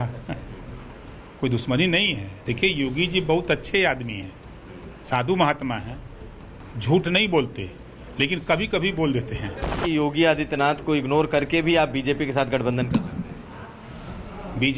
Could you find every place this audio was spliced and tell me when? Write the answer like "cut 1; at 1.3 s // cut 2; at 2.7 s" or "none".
cut 1; at 9.8 s

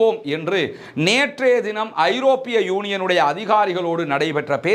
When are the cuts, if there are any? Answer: none

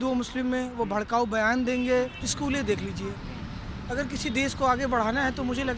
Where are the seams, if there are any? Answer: cut 1; at 2.2 s

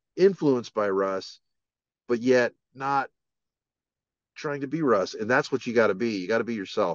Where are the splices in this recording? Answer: none

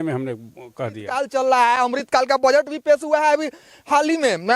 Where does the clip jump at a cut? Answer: cut 1; at 1.1 s

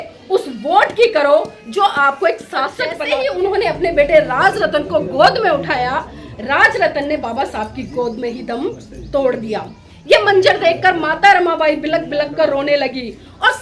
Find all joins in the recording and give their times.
cut 1; at 3.0 s

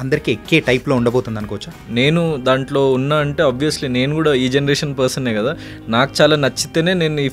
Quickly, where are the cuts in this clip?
cut 1; at 1.7 s

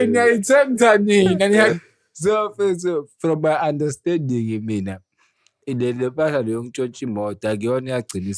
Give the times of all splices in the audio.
cut 1; at 1.8 s

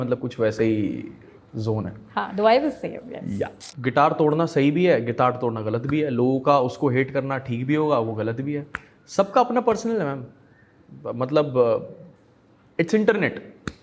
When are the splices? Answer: cut 1; at 3.6 s

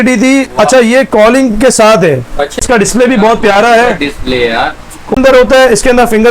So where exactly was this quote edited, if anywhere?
cut 1; at 2.6 s // cut 2; at 5.2 s

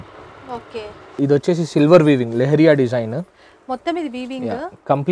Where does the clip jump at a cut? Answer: cut 1; at 1.2 s

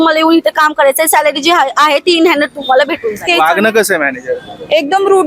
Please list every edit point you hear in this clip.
cut 1; at 3.3 s

